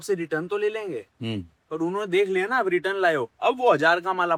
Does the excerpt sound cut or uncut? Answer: uncut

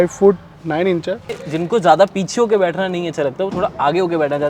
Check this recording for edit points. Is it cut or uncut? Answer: cut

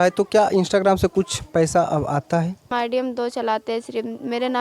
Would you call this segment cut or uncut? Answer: cut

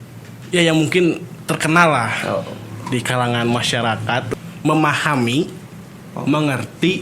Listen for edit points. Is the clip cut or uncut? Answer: cut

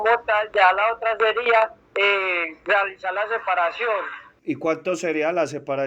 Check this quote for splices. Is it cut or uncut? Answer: uncut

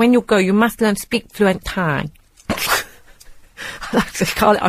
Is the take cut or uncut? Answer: cut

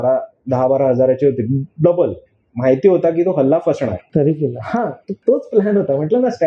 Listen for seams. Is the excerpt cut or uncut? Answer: cut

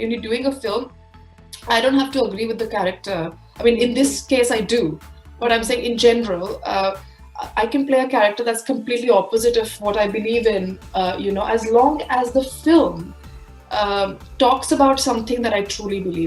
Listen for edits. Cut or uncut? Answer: uncut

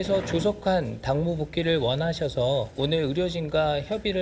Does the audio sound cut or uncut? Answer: cut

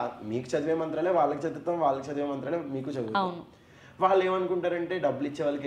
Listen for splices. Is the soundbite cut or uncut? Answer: uncut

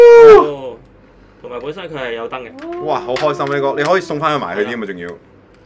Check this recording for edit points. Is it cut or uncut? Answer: uncut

